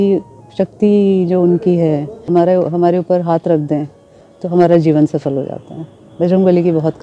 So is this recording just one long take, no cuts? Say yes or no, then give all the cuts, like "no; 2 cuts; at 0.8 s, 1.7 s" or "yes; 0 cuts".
no; 1 cut; at 2.3 s